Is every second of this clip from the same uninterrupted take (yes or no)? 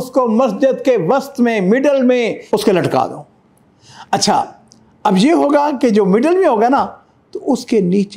yes